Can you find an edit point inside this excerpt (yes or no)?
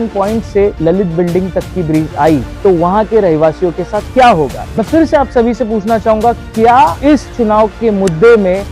yes